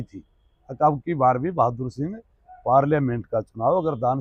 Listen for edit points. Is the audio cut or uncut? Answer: uncut